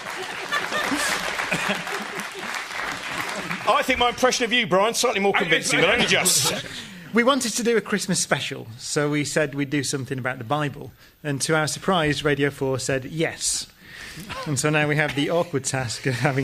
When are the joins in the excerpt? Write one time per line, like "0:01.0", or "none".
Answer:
0:12.5